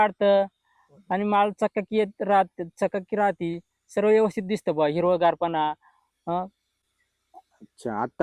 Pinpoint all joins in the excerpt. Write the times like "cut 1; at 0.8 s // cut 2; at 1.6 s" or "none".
none

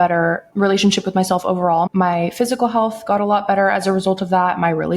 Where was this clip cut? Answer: cut 1; at 1.9 s

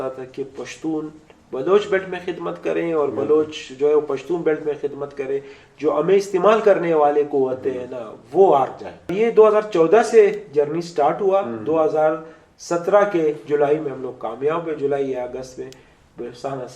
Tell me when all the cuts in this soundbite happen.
cut 1; at 9.1 s

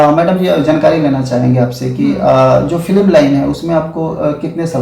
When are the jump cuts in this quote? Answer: none

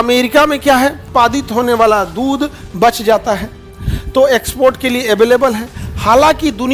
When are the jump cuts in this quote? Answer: cut 1; at 1.0 s

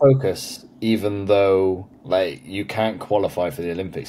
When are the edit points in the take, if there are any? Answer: cut 1; at 1.9 s

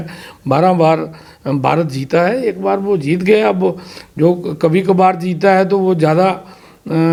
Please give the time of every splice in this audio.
none

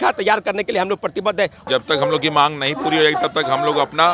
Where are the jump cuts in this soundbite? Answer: cut 1; at 1.7 s

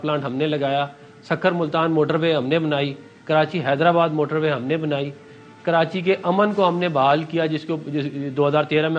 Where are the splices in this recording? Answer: none

